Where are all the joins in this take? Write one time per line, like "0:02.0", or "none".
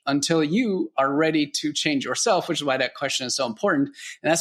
none